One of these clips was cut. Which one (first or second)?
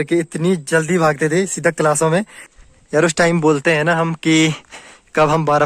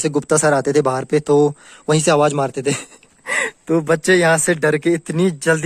first